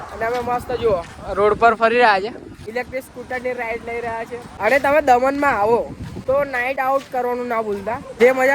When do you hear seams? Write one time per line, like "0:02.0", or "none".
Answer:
0:02.6
0:04.5
0:06.5